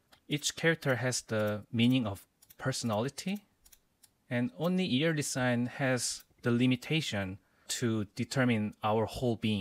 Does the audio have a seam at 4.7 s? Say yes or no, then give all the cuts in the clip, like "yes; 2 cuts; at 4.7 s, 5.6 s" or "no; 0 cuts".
no; 0 cuts